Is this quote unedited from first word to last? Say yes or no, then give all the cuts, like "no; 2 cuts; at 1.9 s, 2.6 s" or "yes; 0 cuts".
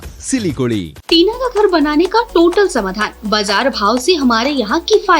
no; 1 cut; at 0.9 s